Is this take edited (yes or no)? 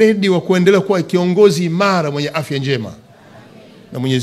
no